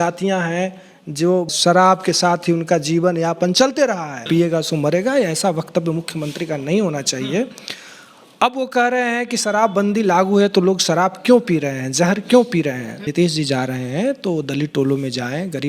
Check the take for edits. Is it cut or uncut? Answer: cut